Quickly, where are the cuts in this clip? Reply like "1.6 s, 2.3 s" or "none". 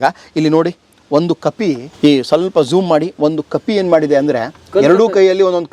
1.9 s